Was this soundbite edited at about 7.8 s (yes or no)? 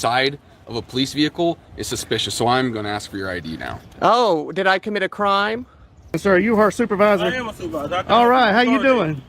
no